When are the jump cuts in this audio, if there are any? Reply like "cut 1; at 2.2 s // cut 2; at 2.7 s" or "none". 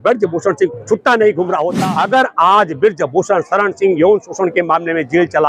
cut 1; at 1.7 s